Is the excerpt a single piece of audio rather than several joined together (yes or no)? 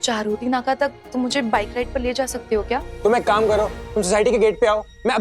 no